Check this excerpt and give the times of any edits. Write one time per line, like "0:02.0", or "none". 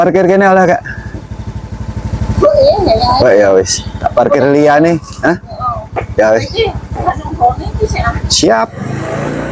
0:03.1